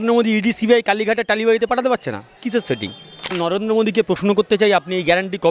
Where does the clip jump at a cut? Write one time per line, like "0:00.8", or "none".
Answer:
0:03.4